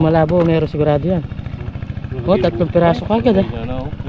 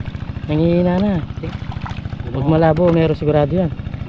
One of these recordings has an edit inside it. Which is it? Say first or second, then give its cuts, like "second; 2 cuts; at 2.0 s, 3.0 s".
second; 1 cut; at 1.3 s